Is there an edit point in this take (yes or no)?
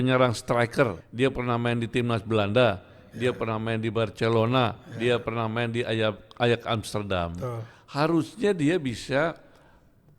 yes